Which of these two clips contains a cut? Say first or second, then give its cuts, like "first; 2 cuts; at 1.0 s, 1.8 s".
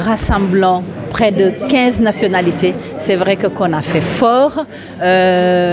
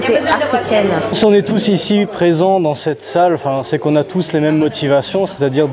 second; 1 cut; at 1.1 s